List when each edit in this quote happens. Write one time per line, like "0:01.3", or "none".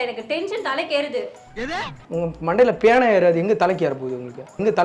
none